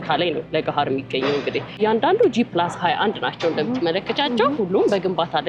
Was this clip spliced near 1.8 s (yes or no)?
yes